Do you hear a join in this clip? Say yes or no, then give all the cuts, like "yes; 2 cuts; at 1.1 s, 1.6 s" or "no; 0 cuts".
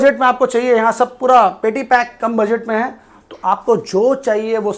no; 0 cuts